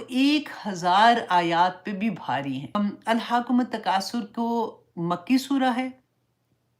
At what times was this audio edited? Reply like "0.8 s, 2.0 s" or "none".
2.8 s